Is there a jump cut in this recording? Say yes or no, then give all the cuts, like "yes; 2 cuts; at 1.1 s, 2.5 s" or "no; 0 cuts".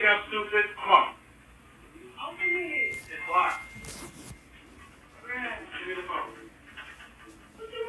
no; 0 cuts